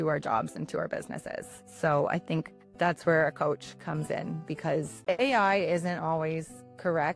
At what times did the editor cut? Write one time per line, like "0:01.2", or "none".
0:04.9